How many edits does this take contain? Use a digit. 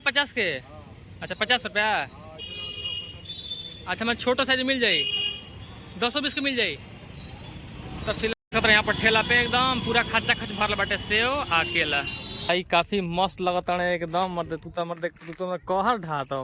2